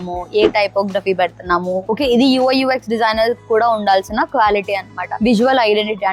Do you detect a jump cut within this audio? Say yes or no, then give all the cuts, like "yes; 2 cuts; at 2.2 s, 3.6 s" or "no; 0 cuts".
no; 0 cuts